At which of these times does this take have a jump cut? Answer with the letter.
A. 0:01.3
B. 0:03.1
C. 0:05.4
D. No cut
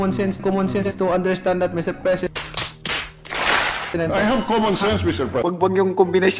C